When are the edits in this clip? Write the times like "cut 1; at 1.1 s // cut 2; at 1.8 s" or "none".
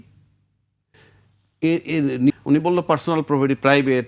cut 1; at 2.3 s